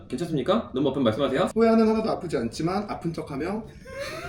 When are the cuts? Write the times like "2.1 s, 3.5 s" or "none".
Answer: 1.5 s